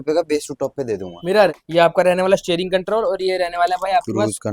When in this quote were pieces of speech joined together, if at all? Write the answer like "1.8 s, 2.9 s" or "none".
1.6 s

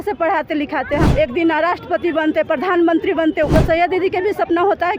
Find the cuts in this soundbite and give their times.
1.1 s, 3.5 s

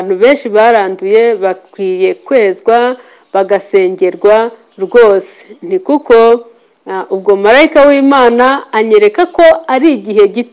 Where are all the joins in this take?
none

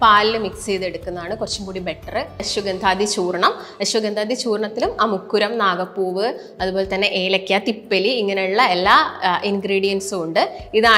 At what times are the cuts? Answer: 2.4 s

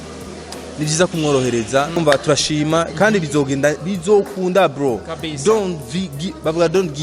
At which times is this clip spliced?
2.0 s

